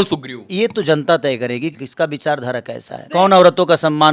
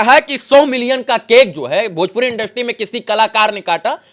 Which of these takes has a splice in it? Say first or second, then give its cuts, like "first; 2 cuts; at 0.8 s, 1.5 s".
first; 2 cuts; at 1.8 s, 3.0 s